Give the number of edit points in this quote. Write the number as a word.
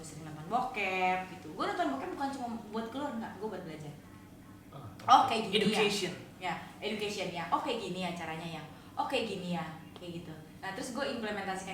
zero